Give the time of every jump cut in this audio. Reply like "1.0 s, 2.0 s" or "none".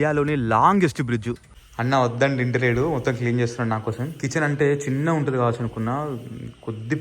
1.7 s